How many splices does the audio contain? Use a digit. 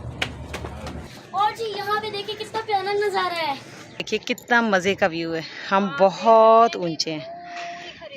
2